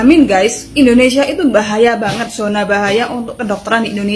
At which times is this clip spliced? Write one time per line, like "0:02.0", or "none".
none